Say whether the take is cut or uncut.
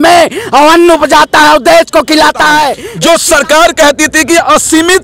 cut